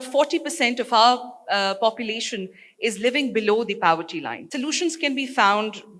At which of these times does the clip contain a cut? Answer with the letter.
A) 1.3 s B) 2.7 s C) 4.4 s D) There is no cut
C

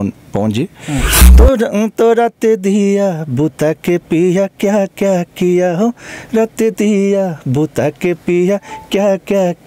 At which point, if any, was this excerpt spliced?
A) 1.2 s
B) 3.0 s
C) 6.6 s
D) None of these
A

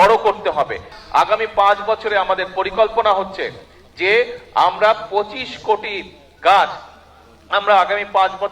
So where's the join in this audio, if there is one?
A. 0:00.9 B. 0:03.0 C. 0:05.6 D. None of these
A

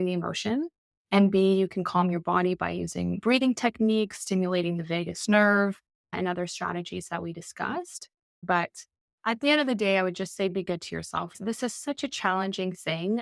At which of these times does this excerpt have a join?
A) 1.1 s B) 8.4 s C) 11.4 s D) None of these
B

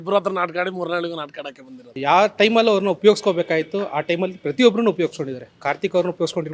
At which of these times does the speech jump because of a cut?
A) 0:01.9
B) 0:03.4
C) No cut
A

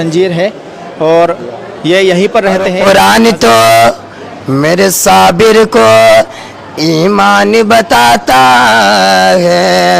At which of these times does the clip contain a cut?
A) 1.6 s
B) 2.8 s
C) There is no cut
B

